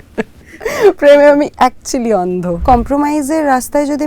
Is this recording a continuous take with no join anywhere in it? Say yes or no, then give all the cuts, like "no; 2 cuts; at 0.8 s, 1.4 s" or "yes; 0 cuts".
no; 1 cut; at 2.6 s